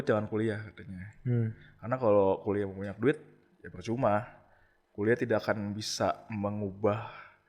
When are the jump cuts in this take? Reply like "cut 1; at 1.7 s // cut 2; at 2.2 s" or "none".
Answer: none